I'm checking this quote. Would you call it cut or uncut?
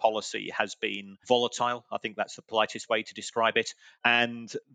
cut